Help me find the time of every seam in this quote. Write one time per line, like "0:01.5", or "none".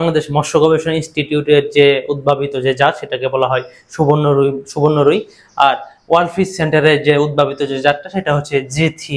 none